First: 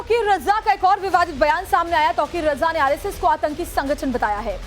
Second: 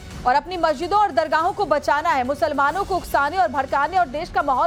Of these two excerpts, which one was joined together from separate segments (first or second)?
first